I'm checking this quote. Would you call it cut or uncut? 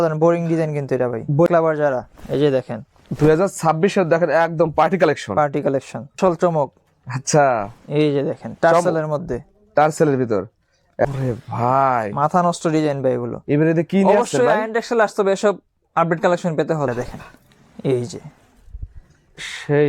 cut